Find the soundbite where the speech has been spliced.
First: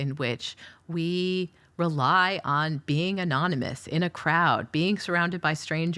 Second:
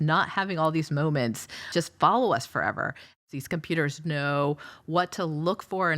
second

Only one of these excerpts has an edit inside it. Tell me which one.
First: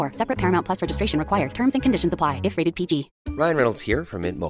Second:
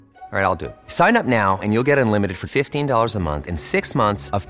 first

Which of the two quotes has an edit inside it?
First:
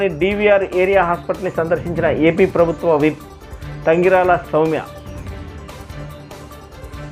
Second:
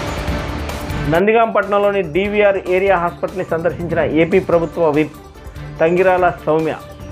second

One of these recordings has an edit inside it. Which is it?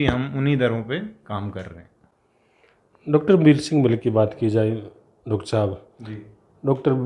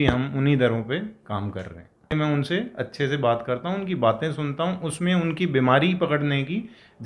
second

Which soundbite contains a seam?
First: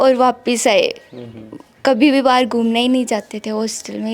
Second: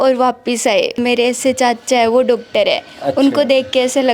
second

